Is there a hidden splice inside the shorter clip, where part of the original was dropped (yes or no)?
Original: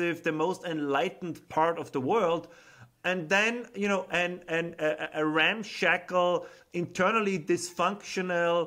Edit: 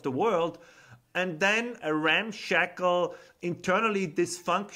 yes